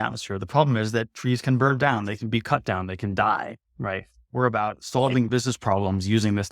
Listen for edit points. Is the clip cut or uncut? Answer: cut